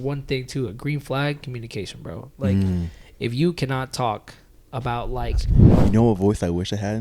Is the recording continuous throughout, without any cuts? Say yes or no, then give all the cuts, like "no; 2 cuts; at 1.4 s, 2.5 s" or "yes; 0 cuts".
no; 1 cut; at 5.6 s